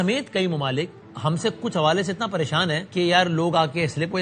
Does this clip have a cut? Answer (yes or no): yes